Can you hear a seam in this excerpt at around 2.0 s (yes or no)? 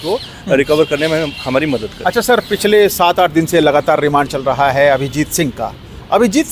no